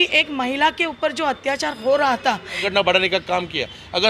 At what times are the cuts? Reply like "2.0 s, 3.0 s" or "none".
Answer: 2.6 s